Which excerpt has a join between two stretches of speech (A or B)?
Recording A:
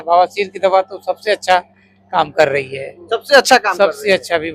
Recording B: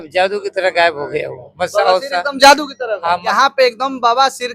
B